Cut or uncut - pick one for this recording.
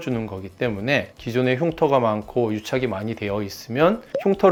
uncut